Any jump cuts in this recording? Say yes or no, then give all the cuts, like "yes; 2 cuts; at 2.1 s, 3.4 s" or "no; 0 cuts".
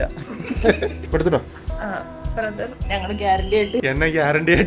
yes; 2 cuts; at 1.0 s, 3.8 s